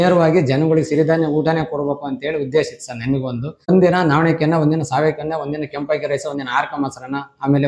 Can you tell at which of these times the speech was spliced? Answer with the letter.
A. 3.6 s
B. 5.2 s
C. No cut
A